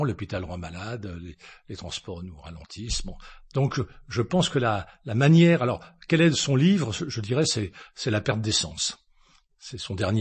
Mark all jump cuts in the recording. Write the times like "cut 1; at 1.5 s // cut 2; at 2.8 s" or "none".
none